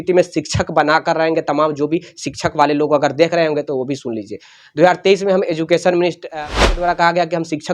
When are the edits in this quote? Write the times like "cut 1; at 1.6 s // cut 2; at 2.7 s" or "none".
cut 1; at 6.4 s